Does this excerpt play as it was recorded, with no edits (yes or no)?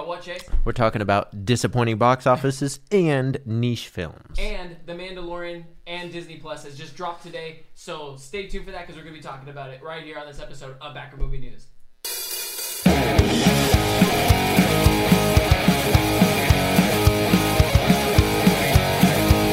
yes